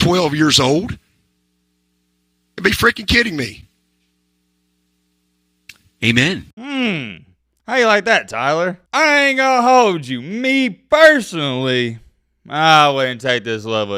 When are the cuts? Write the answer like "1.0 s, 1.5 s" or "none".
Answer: none